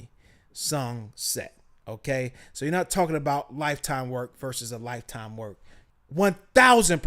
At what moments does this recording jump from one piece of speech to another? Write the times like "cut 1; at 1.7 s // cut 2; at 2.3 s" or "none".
cut 1; at 5.7 s